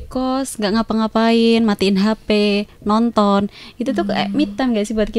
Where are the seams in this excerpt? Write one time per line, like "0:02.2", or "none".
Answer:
none